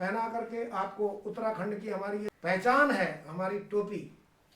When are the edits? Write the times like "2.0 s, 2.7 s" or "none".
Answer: 2.2 s